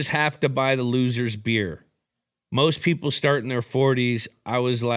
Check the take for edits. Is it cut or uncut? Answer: uncut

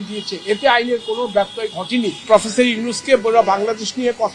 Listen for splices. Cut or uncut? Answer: cut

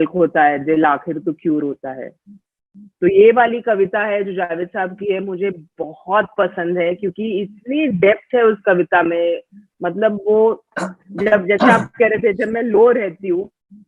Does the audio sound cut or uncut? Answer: uncut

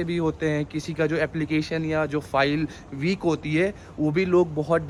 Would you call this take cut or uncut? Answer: uncut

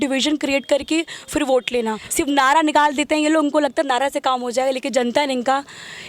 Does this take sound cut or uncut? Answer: cut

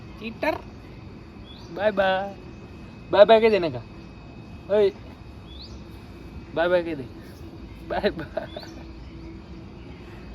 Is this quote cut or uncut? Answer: uncut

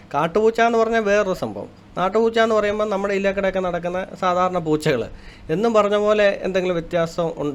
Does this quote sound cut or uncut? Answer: uncut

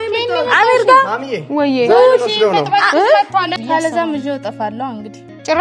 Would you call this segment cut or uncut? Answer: cut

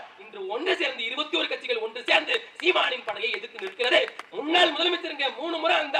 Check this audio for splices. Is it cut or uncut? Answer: cut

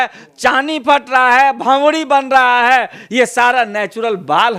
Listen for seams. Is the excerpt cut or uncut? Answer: uncut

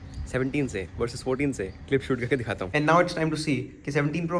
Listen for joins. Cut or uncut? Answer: cut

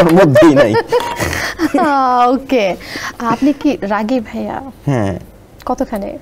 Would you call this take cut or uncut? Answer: uncut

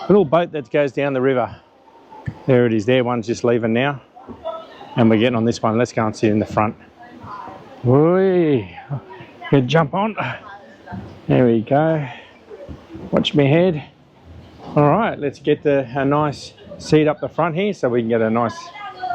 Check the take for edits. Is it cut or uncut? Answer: uncut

